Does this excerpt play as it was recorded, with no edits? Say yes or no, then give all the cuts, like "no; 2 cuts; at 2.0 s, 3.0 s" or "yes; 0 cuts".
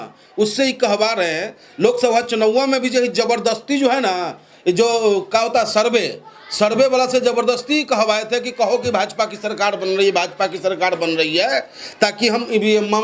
yes; 0 cuts